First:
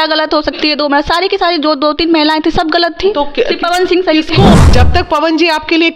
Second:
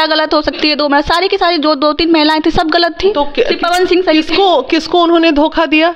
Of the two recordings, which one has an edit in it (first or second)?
first